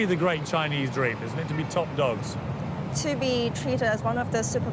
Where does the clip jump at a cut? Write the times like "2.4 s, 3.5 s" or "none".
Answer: none